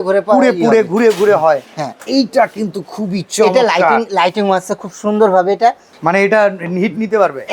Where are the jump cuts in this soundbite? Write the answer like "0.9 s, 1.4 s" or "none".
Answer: 2.0 s, 5.9 s